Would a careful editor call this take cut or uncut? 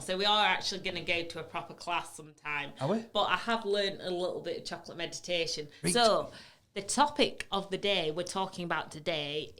cut